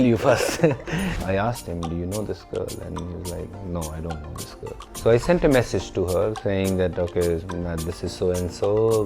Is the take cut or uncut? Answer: cut